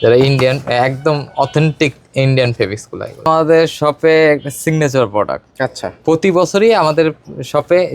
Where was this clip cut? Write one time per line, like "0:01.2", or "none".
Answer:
0:03.2